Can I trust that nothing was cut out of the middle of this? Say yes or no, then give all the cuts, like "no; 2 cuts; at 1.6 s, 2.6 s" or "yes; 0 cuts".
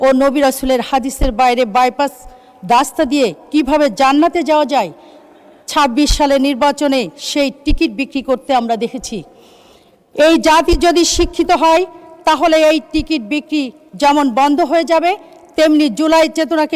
yes; 0 cuts